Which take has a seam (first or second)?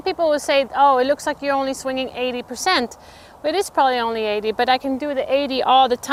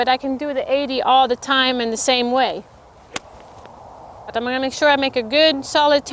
second